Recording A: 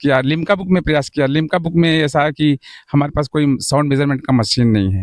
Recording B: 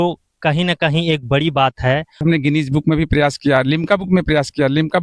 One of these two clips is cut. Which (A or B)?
B